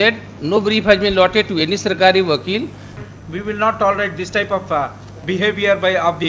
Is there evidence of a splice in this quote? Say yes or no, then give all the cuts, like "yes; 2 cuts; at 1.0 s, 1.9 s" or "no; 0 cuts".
yes; 1 cut; at 2.9 s